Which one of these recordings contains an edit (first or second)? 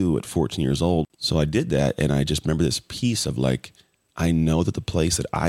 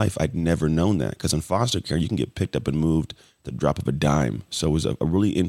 first